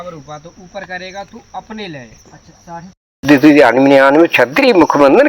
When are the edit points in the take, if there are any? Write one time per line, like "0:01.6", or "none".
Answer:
0:03.2